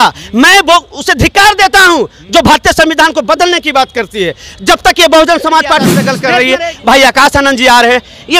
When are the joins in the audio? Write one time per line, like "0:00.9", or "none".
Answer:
0:06.1